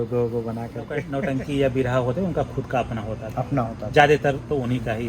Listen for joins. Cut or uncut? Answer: cut